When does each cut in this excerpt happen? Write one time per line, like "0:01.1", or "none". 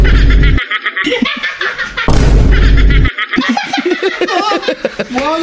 none